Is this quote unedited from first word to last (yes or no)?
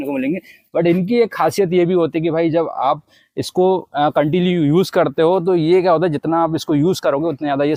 yes